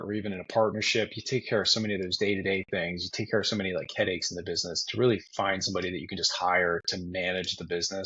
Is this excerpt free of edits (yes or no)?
yes